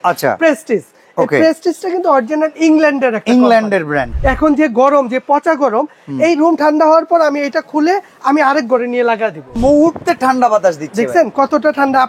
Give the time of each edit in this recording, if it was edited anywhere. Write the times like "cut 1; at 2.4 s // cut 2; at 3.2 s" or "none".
cut 1; at 4.1 s // cut 2; at 9.6 s